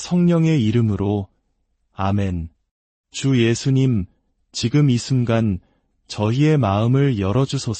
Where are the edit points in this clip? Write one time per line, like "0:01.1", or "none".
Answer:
0:01.1